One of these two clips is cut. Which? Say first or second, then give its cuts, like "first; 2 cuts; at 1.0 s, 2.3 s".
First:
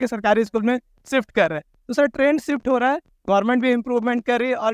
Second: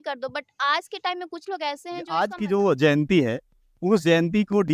second; 1 cut; at 2.0 s